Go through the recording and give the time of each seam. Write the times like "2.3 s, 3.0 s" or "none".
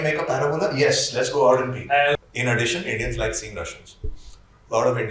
2.2 s